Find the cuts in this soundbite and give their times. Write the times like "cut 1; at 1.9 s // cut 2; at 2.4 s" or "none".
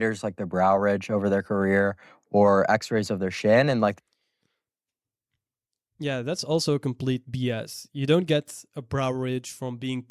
none